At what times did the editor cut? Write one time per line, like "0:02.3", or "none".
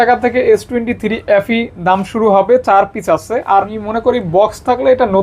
0:03.7